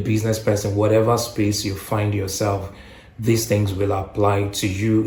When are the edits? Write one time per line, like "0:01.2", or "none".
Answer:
none